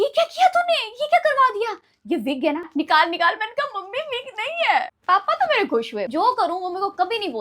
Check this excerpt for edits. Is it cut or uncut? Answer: cut